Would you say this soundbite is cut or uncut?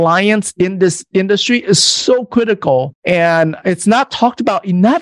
cut